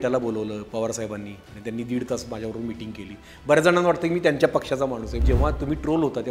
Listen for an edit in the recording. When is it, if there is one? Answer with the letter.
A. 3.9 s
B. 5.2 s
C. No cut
B